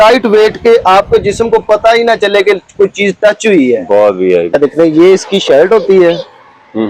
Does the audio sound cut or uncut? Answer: cut